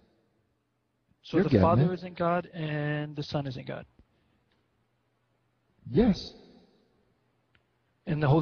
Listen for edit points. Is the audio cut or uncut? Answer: uncut